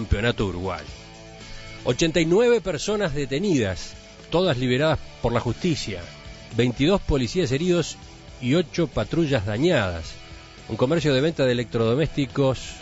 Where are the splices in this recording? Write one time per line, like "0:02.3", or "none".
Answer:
0:01.9